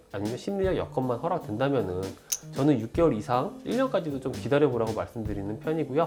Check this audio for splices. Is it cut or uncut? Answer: uncut